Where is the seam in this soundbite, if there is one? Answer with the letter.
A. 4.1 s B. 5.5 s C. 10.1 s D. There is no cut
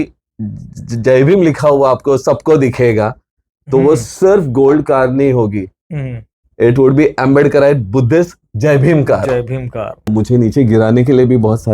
C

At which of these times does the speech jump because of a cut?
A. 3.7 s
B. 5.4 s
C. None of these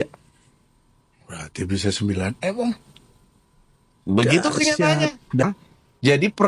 B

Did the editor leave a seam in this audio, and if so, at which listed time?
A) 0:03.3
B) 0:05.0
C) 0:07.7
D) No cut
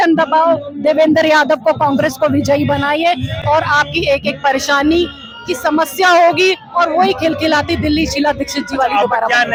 D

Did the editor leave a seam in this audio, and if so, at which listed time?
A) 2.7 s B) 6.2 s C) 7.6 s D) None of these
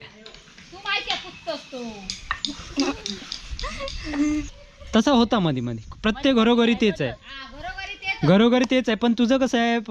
D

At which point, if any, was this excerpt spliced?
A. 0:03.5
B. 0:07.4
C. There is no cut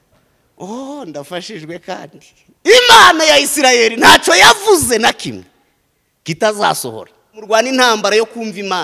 B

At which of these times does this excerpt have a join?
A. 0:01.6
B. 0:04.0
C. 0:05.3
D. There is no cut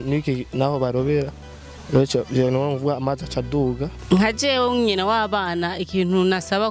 B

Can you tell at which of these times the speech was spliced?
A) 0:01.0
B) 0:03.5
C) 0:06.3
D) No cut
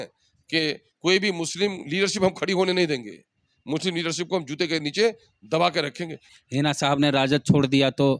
C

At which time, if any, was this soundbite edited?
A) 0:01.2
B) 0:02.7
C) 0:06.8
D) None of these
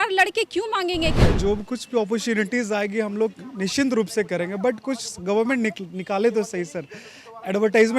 A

